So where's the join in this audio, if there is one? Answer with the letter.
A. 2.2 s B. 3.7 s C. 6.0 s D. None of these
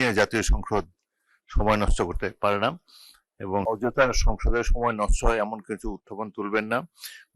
B